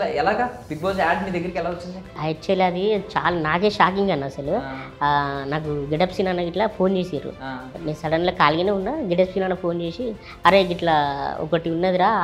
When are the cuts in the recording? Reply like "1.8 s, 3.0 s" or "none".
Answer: 2.2 s

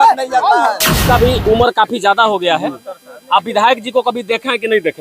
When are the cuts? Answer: 1.0 s

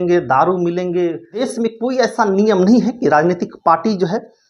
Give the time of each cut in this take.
1.5 s

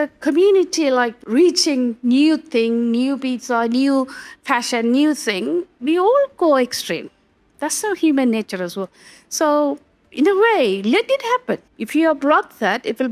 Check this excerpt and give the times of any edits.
1.2 s, 11.7 s

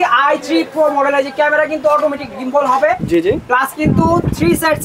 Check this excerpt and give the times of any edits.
none

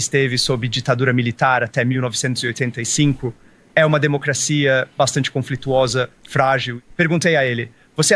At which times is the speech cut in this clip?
6.8 s

